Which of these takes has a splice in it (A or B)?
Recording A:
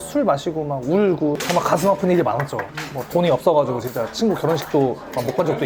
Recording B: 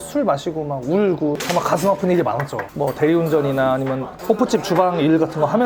B